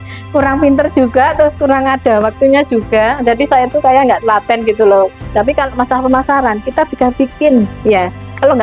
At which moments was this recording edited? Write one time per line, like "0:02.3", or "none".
0:05.2